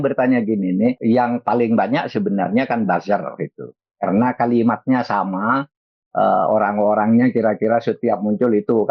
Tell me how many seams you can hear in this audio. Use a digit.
1